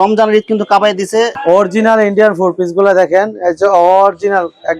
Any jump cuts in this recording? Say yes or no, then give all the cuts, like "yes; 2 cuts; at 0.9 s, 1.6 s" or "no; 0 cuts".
yes; 1 cut; at 1.3 s